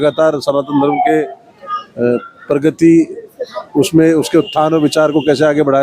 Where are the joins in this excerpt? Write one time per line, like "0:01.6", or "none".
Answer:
none